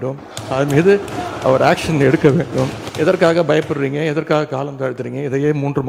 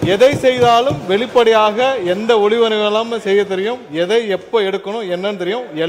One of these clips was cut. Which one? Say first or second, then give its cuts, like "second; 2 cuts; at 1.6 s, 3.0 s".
first; 1 cut; at 2.8 s